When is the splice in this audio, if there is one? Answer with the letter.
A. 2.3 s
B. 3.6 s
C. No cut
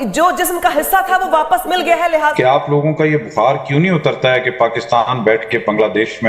A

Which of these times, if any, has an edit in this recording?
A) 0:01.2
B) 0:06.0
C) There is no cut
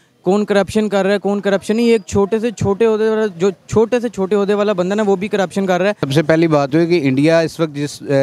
B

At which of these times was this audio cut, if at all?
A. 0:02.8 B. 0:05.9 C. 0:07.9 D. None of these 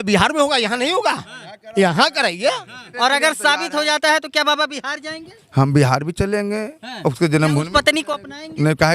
A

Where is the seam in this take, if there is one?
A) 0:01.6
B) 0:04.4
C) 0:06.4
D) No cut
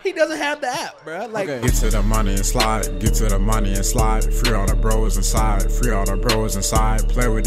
A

